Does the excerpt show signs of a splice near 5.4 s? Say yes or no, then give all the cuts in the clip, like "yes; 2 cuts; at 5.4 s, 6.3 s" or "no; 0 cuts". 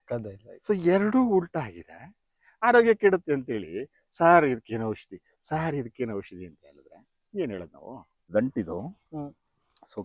no; 1 cut; at 8.3 s